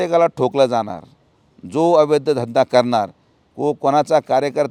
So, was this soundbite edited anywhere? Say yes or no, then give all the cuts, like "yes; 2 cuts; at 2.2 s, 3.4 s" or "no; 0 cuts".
no; 0 cuts